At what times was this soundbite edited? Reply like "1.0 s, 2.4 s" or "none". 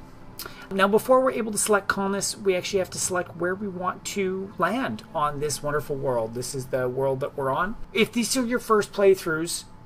8.0 s